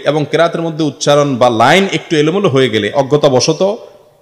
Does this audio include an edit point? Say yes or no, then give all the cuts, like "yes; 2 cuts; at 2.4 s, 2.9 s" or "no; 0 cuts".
no; 0 cuts